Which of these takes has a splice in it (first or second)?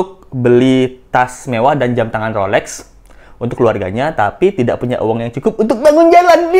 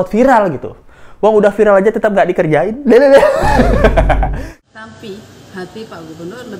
second